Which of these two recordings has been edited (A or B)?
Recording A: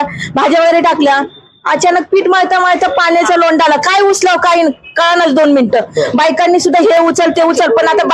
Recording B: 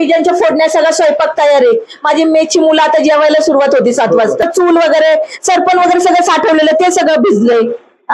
B